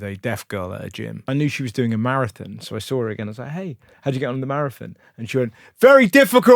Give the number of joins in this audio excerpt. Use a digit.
1